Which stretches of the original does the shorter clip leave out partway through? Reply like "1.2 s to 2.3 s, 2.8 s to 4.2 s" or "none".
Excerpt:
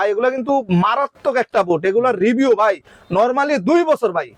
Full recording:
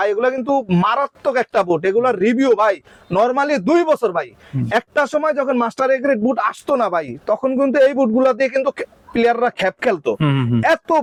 none